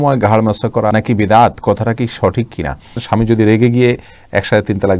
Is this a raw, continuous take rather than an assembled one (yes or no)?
no